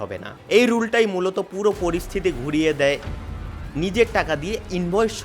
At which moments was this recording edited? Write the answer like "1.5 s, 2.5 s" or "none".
3.1 s